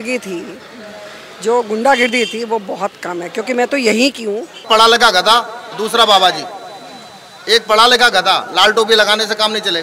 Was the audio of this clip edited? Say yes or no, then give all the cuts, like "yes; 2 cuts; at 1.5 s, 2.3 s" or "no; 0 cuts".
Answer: yes; 1 cut; at 4.6 s